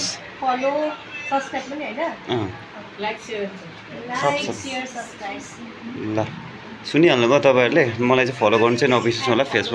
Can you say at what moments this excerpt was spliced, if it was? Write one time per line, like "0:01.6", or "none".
none